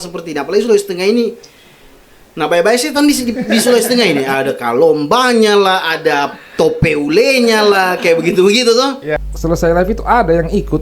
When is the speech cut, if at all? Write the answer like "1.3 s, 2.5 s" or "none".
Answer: 9.2 s